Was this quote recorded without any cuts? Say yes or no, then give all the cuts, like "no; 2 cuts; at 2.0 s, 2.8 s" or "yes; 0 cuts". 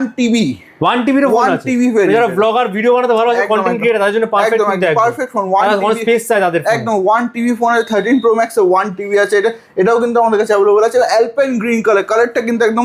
yes; 0 cuts